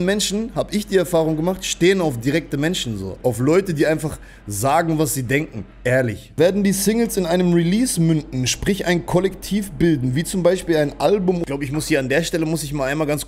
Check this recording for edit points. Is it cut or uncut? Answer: cut